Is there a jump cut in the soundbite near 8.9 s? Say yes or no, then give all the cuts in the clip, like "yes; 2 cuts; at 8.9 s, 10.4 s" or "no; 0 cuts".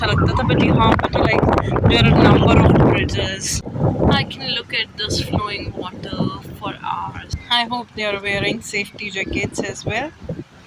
no; 2 cuts; at 3.6 s, 7.4 s